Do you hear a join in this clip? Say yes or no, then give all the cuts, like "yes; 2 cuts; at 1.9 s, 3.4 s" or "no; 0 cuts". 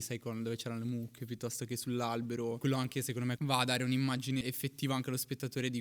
yes; 3 cuts; at 2.6 s, 3.4 s, 4.4 s